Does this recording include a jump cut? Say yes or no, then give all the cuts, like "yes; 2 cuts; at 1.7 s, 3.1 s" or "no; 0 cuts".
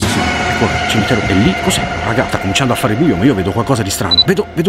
no; 0 cuts